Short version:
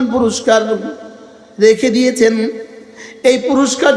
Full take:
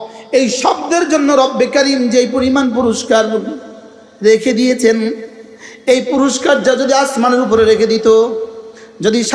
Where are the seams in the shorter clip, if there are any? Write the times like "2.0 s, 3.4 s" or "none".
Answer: none